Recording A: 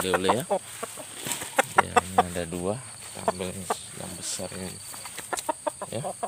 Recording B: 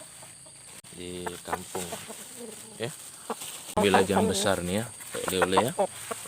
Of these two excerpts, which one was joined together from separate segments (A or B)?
B